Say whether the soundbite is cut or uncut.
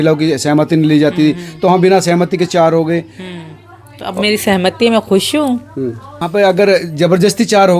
cut